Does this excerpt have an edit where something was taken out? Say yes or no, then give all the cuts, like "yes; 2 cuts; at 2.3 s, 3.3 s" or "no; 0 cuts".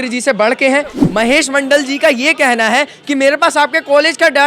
yes; 1 cut; at 0.9 s